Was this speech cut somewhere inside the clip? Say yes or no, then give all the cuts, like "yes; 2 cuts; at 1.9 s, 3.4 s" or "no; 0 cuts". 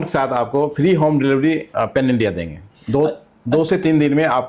no; 0 cuts